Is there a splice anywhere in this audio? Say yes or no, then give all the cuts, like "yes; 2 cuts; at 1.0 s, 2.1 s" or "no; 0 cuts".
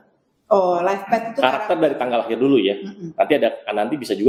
no; 0 cuts